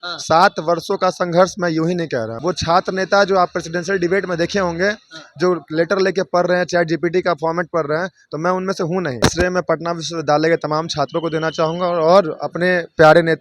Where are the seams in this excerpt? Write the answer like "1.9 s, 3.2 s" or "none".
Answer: 2.3 s, 9.2 s